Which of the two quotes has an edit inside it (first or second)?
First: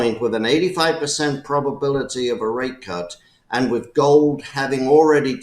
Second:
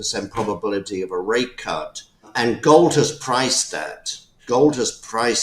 second